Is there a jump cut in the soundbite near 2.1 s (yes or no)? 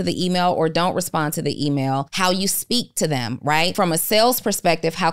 yes